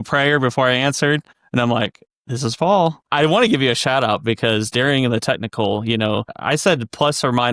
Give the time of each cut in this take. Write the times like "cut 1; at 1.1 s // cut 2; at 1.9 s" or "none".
cut 1; at 3.0 s // cut 2; at 6.3 s